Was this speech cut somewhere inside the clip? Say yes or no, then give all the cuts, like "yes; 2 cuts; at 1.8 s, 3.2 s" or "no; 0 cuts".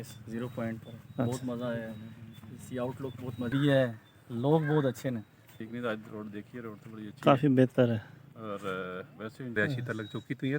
yes; 3 cuts; at 3.5 s, 5.6 s, 9.5 s